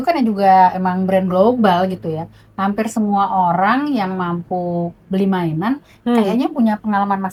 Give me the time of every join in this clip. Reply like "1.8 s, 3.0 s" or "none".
none